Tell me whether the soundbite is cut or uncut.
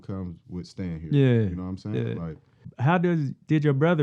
cut